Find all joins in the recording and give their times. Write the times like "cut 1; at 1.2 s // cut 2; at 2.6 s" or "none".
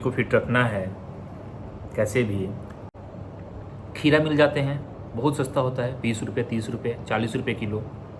cut 1; at 2.9 s